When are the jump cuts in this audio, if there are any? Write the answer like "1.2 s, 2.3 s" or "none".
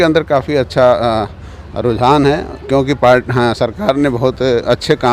none

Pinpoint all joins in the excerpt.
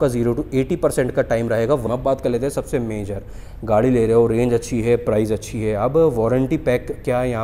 1.8 s

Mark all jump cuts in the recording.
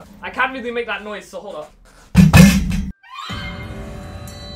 2.9 s

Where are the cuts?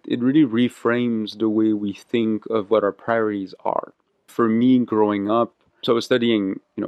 4.3 s, 5.7 s

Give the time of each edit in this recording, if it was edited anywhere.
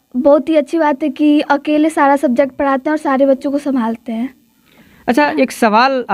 none

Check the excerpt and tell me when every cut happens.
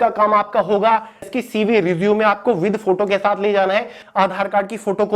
1.2 s, 4.0 s

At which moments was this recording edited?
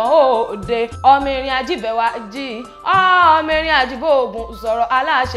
none

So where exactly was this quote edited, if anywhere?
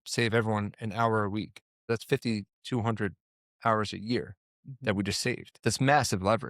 1.9 s, 5.5 s

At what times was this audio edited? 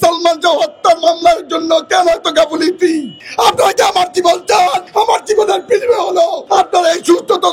3.2 s, 4.8 s, 6.4 s

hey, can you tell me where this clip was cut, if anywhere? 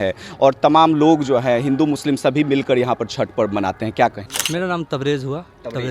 4.3 s

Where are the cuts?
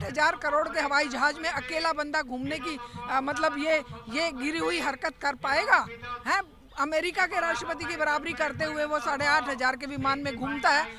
none

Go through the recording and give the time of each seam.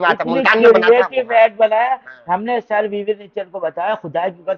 none

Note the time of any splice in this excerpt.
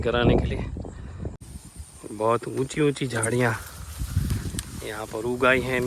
1.4 s

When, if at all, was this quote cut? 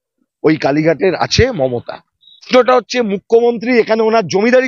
2.5 s

